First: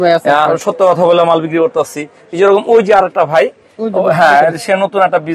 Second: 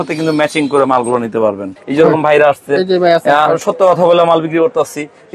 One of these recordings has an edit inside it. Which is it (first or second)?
second